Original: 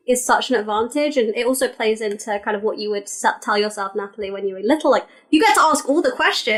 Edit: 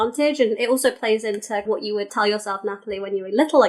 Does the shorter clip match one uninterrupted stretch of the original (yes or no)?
no